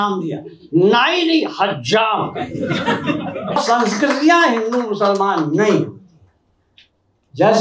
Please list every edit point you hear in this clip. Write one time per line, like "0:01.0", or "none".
0:03.6

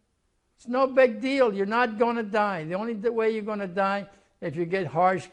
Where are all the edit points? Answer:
none

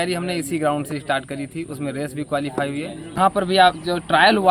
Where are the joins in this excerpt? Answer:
0:03.2

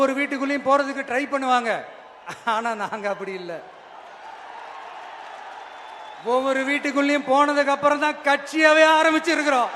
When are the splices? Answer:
none

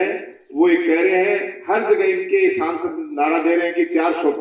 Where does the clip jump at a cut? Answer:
none

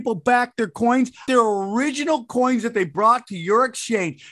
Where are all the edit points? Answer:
0:01.3

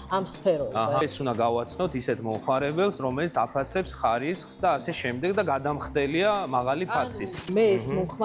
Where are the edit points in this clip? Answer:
0:01.0
0:03.0
0:07.4

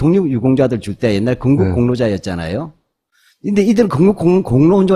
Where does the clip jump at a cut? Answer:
none

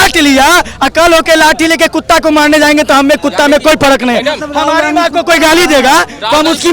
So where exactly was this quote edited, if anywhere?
none

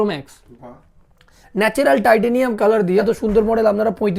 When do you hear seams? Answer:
0:03.0

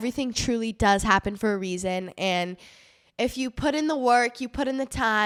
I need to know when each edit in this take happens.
none

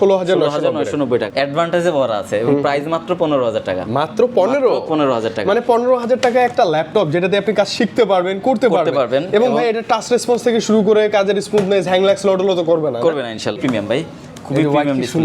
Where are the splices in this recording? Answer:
0:01.3
0:13.6

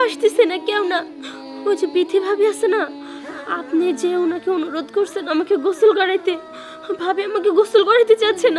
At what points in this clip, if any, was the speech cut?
none

